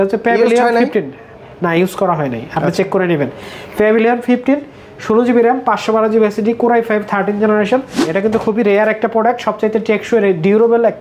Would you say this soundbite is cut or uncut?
cut